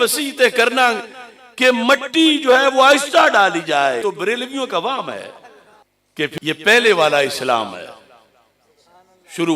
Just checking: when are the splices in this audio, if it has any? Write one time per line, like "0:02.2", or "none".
0:04.0
0:06.3